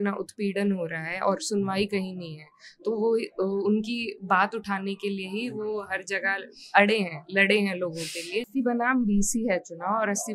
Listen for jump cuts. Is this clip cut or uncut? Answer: cut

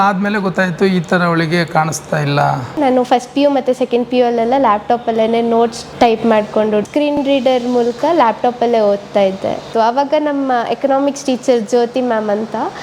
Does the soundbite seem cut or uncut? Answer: cut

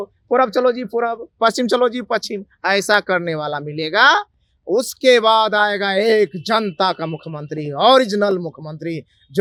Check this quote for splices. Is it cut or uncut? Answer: uncut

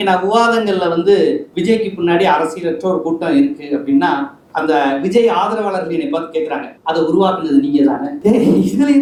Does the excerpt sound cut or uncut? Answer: uncut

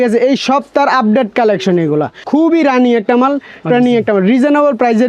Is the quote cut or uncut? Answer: cut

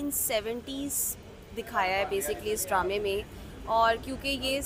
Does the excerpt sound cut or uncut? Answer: uncut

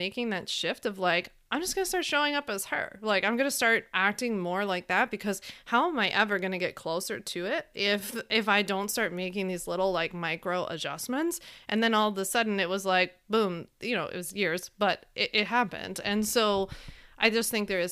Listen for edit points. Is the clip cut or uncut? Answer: uncut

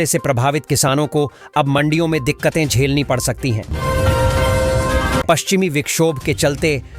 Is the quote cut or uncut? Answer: cut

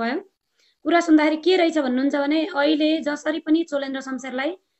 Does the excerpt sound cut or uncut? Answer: uncut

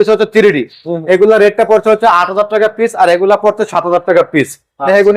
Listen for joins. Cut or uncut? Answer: uncut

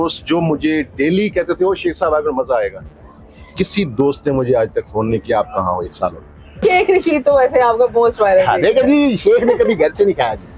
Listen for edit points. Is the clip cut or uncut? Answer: cut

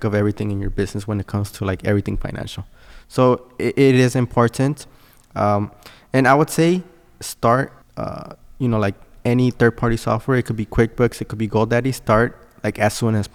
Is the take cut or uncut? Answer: uncut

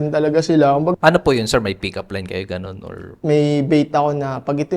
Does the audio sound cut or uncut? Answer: cut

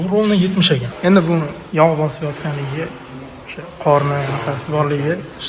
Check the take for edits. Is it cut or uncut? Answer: cut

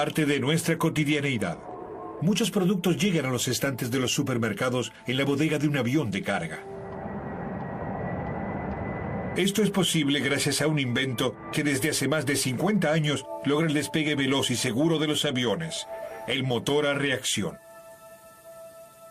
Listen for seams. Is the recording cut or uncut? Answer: cut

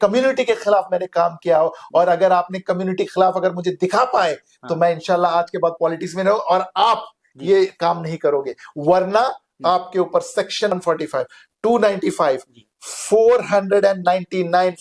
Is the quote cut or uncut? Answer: cut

